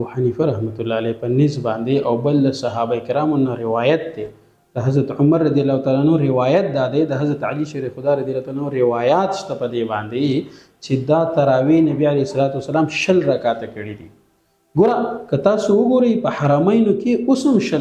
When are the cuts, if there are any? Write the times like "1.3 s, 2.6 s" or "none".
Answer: none